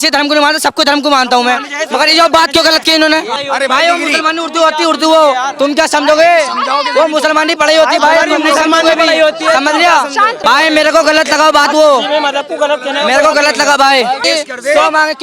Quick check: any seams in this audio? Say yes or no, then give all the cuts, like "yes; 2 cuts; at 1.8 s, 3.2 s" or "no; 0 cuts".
yes; 3 cuts; at 3.3 s, 10.4 s, 14.2 s